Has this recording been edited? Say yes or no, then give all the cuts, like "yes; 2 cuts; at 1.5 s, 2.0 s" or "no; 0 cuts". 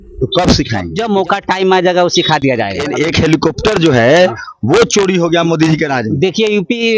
yes; 2 cuts; at 0.9 s, 2.8 s